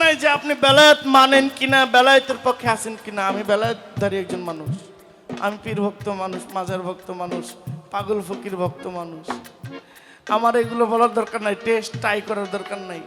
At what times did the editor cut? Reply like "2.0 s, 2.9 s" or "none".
none